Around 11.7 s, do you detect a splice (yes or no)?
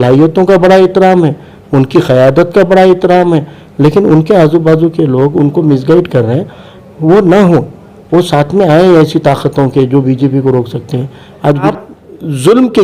yes